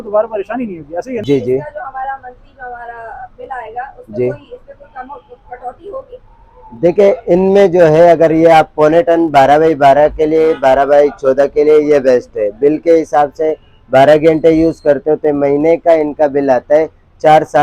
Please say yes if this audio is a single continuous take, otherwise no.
no